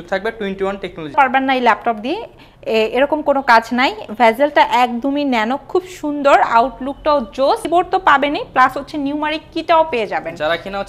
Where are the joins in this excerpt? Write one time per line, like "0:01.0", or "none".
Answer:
0:01.1
0:07.6

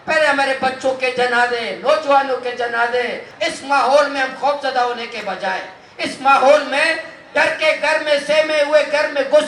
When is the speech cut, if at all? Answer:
0:03.3

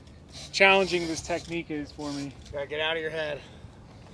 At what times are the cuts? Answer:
0:02.4

